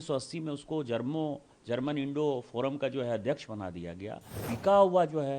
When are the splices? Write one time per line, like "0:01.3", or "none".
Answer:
0:04.4

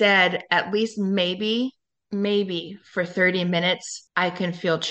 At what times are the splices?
0:04.0

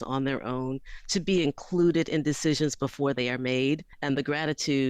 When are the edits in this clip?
0:03.9

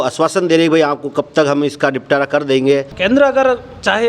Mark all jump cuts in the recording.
0:02.9

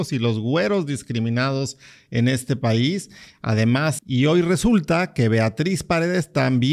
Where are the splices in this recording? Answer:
0:04.0

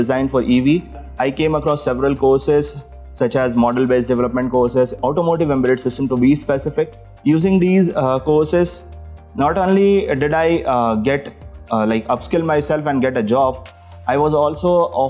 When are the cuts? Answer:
0:01.0
0:05.0
0:07.0

